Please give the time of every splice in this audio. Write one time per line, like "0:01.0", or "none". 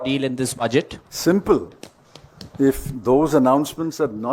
0:01.0